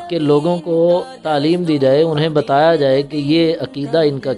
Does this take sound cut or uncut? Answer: uncut